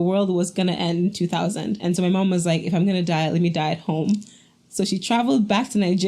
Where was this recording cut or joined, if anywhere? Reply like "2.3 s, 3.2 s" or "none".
1.8 s